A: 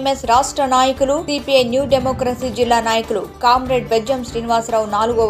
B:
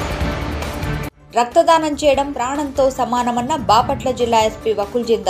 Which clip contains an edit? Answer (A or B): B